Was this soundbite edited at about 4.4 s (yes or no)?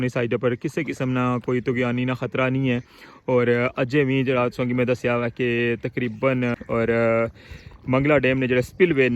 no